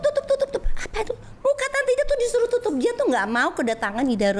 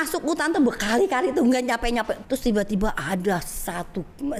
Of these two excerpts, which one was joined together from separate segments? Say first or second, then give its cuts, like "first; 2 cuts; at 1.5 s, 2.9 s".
second; 1 cut; at 2.2 s